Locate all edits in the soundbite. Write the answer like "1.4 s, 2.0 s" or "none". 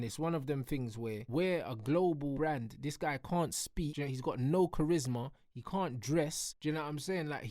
1.2 s, 2.3 s, 3.9 s, 6.5 s